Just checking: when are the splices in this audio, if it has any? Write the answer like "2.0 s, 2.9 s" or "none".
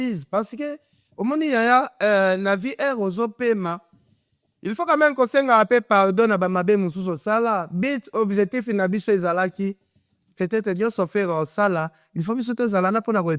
none